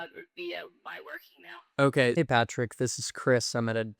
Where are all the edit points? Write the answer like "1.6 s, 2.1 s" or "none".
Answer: 2.1 s